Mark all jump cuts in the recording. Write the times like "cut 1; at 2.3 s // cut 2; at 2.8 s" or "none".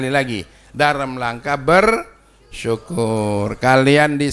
none